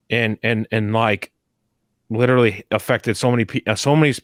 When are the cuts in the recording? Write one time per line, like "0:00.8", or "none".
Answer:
none